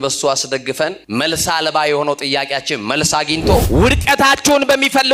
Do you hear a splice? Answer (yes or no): yes